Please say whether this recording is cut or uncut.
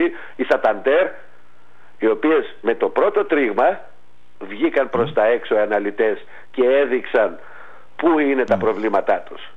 uncut